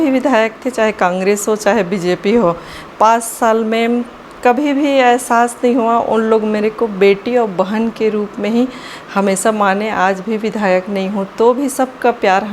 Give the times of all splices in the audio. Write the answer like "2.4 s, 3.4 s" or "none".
none

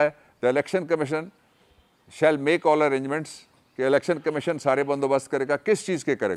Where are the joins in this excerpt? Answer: none

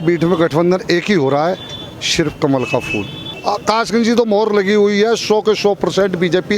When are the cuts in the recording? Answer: 3.3 s

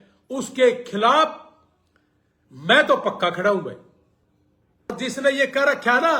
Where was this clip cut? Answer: 5.0 s

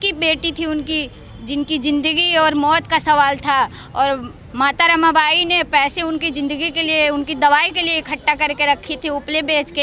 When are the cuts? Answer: none

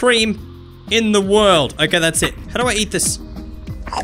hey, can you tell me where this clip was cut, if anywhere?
2.4 s

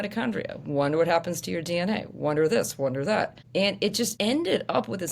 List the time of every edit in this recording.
3.9 s

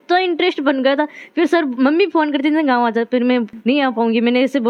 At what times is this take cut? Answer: none

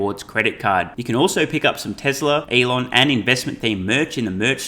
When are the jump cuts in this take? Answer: 2.5 s

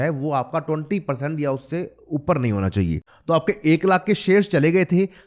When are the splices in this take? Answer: 3.1 s

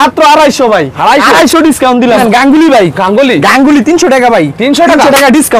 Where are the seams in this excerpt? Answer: 2.2 s

